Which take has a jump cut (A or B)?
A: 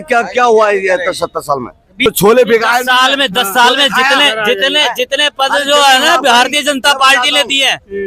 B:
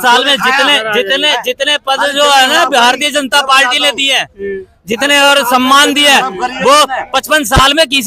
A